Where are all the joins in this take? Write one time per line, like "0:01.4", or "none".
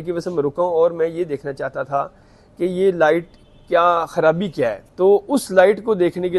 0:04.8